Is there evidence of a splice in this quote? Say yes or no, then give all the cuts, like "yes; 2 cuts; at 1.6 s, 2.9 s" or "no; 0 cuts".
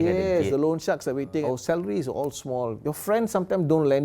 yes; 2 cuts; at 1.4 s, 2.8 s